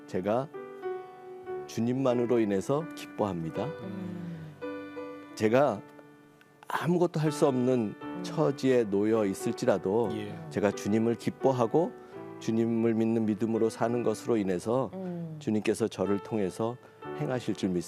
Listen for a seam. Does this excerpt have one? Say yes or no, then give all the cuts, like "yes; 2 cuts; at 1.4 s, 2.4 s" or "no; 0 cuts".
no; 0 cuts